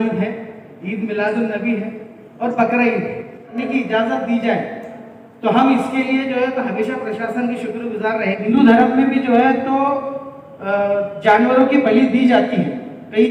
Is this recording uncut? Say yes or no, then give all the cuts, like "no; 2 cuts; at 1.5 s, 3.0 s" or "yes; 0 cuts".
no; 2 cuts; at 3.6 s, 8.5 s